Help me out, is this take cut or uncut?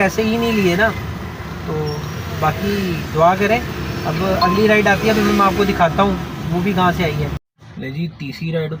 uncut